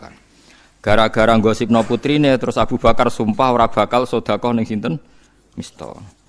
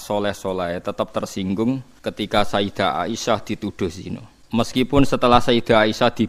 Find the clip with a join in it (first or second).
second